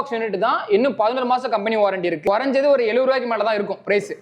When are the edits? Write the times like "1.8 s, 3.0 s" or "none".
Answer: none